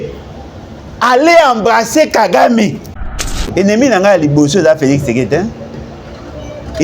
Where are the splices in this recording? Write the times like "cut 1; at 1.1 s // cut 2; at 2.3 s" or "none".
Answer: cut 1; at 3.3 s